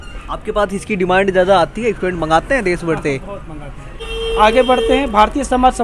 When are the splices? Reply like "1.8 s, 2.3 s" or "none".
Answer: 3.9 s